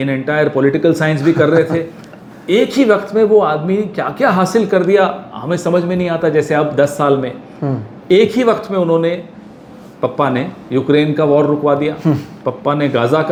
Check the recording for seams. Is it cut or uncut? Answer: uncut